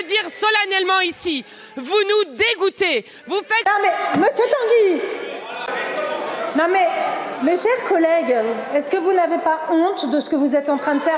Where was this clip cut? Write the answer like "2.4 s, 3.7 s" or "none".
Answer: 3.7 s, 5.7 s